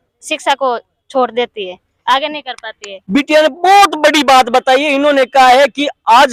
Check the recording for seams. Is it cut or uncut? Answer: uncut